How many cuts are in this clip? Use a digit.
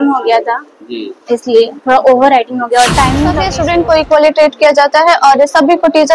1